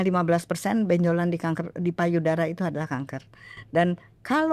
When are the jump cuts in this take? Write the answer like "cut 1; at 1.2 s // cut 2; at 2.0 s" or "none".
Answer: none